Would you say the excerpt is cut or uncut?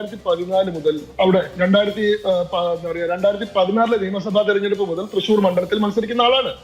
uncut